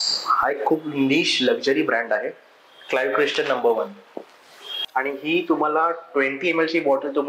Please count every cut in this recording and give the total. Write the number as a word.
one